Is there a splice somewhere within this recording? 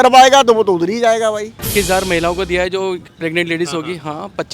yes; 1 cut; at 1.5 s

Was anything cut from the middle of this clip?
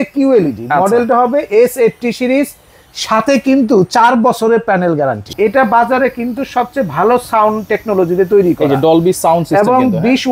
yes; 1 cut; at 5.3 s

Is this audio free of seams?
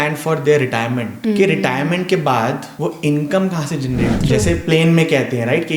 no; 3 cuts; at 1.1 s, 2.7 s, 4.2 s

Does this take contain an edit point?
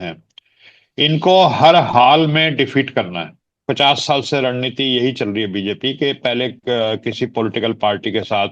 yes; 1 cut; at 3.5 s

